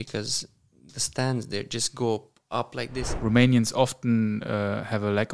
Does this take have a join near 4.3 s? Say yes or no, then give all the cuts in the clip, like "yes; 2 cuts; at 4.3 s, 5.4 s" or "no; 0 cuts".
no; 1 cut; at 3.0 s